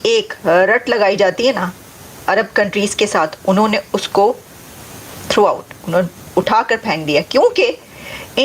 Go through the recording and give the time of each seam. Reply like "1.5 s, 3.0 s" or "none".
none